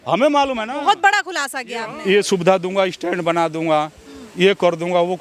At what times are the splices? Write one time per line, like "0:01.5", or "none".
0:01.8